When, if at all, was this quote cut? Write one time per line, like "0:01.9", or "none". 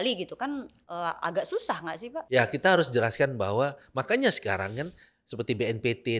0:02.2